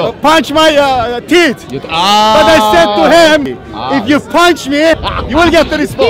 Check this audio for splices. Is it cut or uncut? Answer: cut